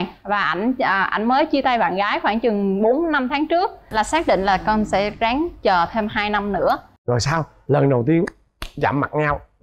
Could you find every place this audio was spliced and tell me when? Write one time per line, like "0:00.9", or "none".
0:03.9